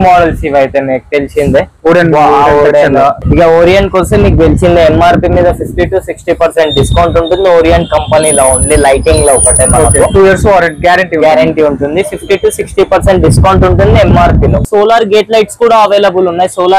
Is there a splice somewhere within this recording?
yes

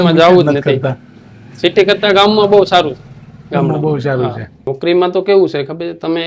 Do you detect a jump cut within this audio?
yes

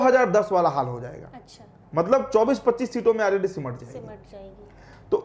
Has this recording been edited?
no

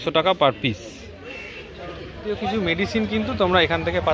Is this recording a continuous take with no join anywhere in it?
no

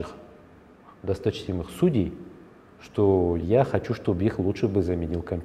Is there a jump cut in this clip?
yes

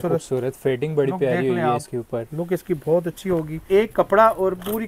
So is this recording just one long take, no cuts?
no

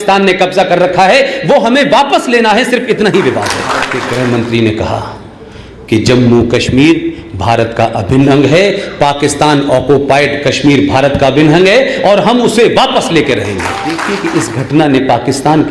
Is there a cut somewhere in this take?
yes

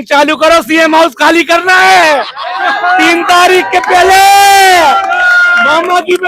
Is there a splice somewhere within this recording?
no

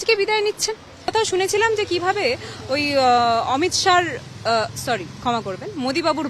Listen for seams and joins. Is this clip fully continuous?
no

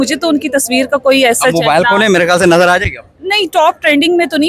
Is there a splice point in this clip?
no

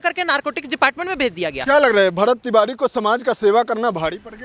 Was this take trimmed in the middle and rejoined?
yes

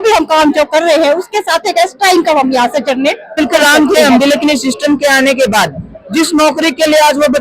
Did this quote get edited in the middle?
yes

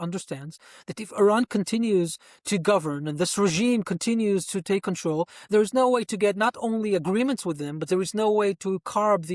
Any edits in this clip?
no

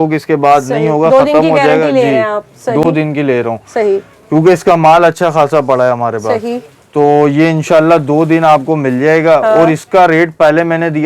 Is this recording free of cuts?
yes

